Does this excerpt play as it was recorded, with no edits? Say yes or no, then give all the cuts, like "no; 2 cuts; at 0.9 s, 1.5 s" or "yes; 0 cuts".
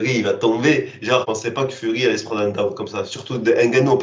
no; 1 cut; at 1.3 s